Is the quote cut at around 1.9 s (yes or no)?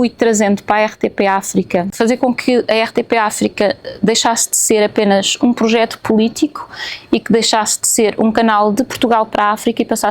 yes